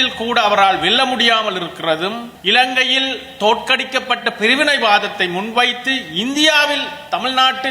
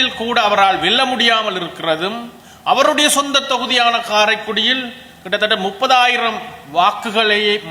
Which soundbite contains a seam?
first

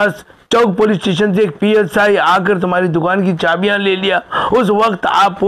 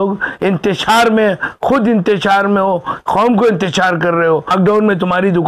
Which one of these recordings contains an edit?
second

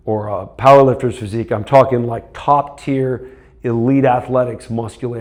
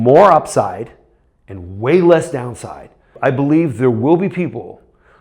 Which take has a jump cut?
second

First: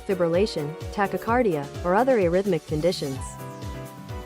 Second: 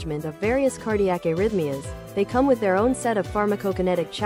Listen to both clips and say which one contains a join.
first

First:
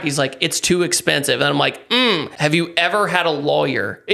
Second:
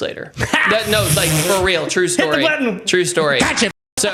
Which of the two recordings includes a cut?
first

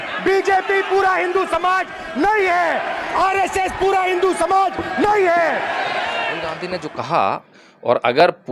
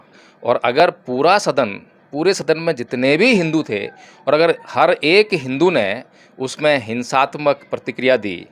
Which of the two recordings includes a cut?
first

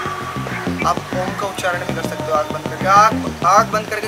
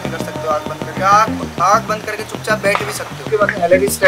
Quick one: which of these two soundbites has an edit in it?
second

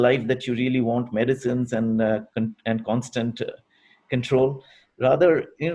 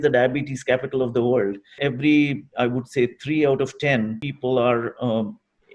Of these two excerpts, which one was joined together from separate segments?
second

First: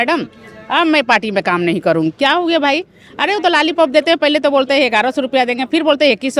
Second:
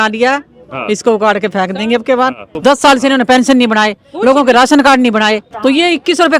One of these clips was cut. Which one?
second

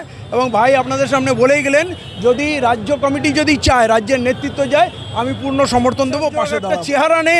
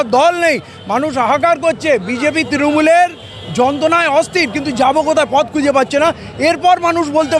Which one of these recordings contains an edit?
first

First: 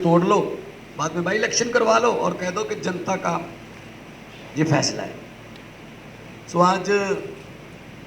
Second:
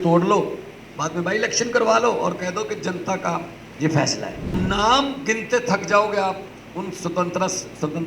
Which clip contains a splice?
second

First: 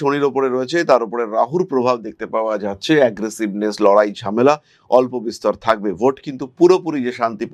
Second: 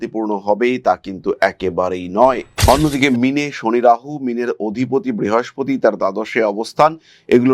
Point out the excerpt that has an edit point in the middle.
second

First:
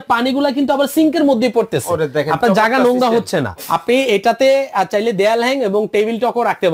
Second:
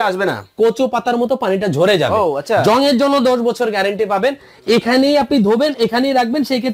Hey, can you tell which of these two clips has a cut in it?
first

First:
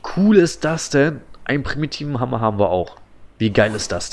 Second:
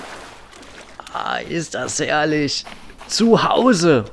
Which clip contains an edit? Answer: second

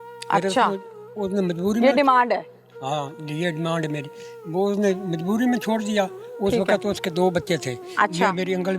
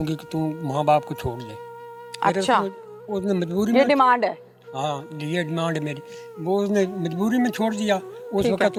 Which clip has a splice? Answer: first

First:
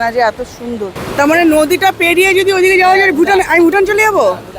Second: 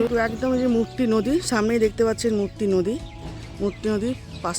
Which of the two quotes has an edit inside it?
first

